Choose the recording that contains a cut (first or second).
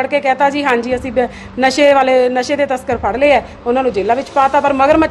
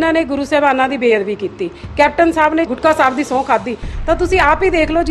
second